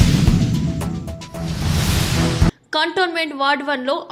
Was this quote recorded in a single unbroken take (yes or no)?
yes